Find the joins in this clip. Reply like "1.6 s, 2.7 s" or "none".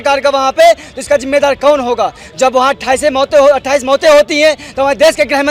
none